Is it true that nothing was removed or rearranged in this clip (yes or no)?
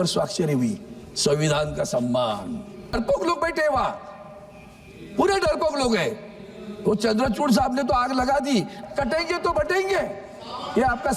no